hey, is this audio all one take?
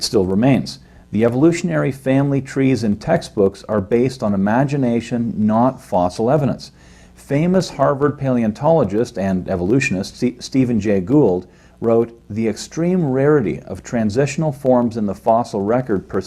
no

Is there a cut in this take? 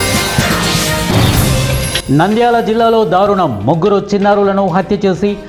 no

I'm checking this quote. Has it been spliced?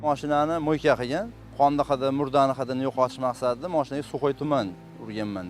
yes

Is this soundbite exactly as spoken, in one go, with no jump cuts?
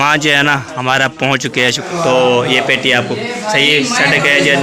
no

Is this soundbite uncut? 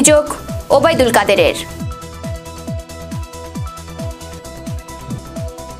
yes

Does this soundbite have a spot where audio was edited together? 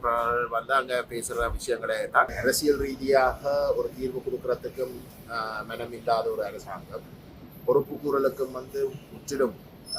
yes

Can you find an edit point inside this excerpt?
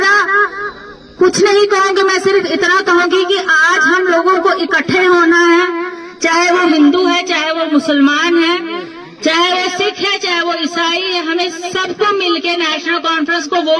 no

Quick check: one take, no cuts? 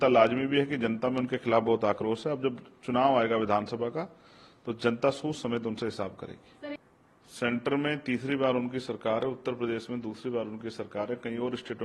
no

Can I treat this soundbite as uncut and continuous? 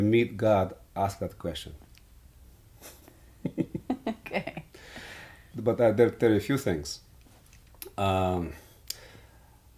no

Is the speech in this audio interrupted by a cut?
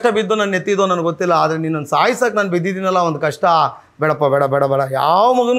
no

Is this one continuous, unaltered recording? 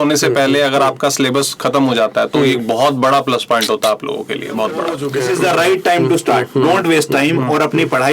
no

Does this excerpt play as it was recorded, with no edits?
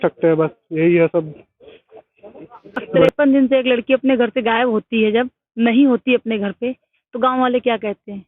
no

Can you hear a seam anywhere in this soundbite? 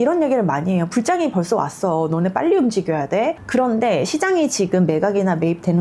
yes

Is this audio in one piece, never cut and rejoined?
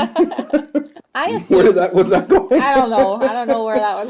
no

